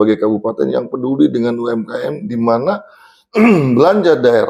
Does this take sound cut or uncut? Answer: uncut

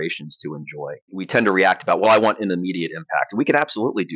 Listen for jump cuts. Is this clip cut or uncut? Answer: cut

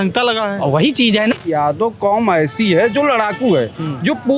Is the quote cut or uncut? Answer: cut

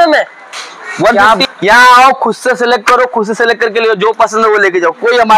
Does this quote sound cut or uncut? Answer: cut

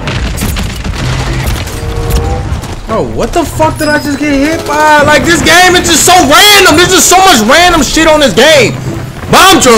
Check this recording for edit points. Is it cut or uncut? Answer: uncut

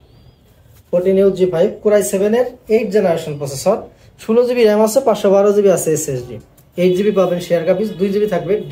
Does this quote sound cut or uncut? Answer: uncut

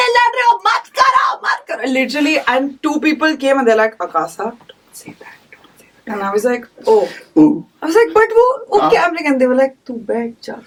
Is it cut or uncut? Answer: uncut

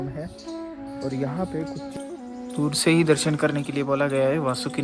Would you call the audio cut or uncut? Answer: cut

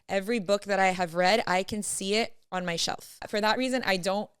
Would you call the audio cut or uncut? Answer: cut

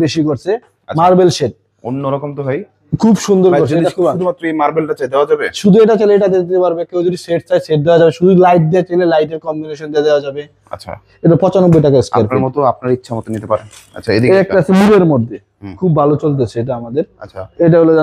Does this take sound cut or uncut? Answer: uncut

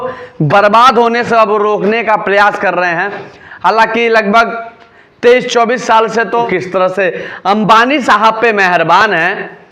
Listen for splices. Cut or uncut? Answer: cut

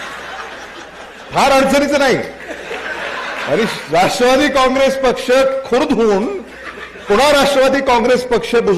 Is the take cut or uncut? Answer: uncut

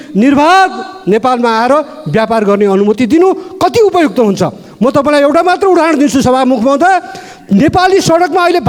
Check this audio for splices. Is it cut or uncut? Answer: uncut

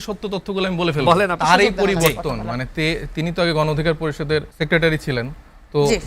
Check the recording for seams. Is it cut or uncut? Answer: cut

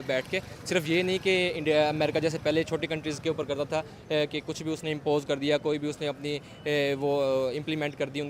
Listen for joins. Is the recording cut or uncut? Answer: uncut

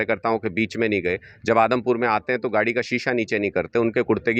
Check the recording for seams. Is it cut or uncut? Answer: uncut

